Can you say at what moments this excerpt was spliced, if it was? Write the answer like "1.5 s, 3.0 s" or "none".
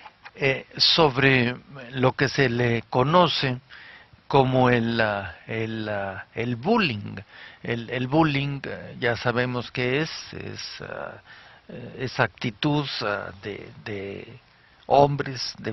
none